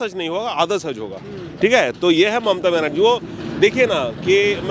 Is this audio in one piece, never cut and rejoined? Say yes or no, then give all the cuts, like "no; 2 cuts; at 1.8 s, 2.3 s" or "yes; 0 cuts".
yes; 0 cuts